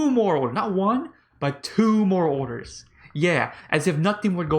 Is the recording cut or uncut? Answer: uncut